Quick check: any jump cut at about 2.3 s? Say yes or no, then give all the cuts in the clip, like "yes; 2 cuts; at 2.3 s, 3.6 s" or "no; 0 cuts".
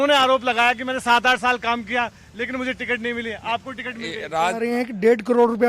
no; 1 cut; at 4.6 s